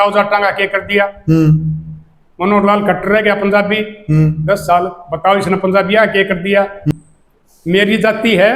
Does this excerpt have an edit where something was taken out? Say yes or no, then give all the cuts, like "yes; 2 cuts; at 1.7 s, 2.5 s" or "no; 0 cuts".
yes; 1 cut; at 6.9 s